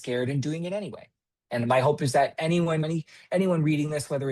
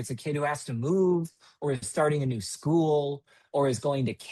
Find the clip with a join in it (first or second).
first